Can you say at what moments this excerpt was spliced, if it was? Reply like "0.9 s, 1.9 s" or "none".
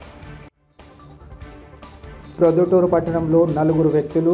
2.1 s